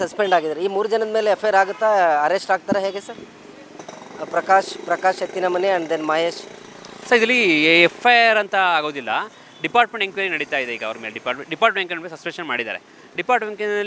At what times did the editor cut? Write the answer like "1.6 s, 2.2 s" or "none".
none